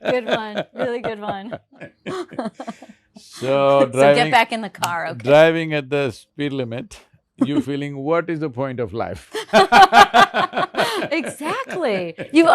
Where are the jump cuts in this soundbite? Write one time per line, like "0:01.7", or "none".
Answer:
0:01.7